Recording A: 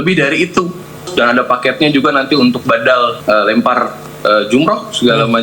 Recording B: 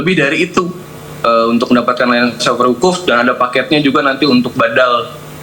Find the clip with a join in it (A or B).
A